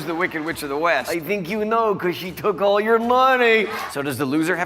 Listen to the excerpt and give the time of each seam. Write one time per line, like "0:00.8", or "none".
0:01.0
0:03.8

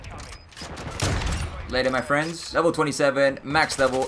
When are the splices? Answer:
0:02.4

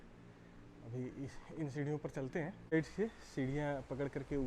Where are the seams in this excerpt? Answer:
0:02.7

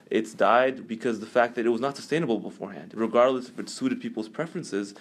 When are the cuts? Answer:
0:00.8
0:02.9

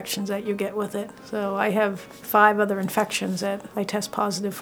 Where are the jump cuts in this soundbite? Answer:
0:01.2
0:02.1
0:03.7

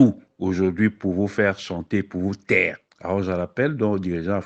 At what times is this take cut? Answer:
0:02.9

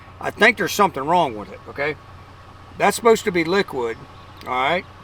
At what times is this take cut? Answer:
none

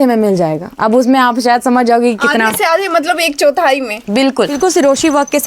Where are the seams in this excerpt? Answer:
0:04.5

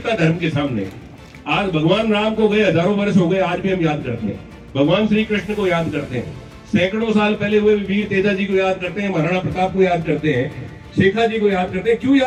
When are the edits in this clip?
none

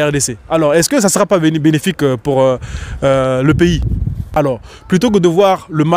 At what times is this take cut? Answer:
0:04.4

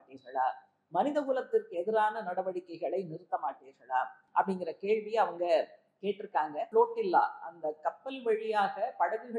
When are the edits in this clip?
0:04.2
0:06.6

